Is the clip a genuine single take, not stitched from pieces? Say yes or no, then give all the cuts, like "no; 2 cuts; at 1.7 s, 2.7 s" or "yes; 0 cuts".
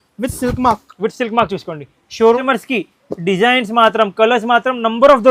no; 1 cut; at 2.4 s